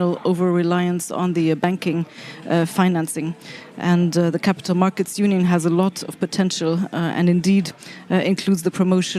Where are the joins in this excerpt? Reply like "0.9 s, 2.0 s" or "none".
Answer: none